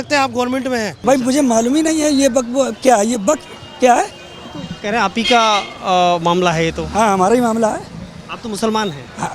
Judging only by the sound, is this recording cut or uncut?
cut